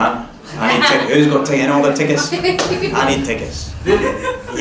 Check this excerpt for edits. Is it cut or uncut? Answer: uncut